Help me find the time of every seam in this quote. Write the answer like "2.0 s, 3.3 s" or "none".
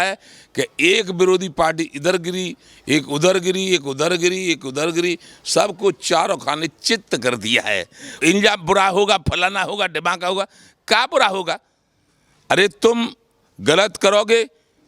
8.2 s